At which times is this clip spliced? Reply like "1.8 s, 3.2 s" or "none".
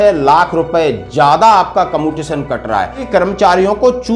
3.0 s